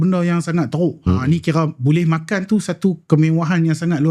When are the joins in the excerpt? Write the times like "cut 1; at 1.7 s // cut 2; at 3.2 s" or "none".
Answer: cut 1; at 1.0 s